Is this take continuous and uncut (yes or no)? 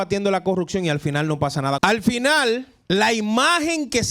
no